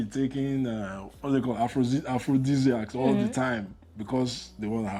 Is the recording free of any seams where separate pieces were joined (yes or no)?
yes